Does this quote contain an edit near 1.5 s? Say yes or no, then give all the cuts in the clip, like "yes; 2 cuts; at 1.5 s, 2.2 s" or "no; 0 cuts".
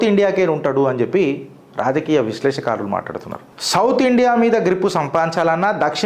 no; 0 cuts